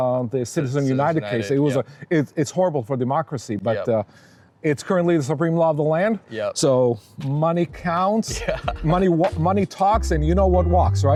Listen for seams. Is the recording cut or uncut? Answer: uncut